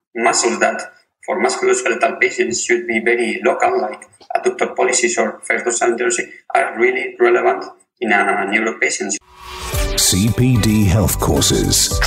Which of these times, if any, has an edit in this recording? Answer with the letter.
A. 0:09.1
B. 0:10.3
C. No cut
A